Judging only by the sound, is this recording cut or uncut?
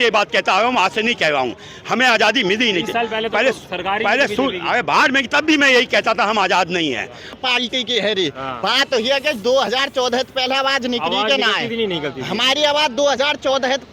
cut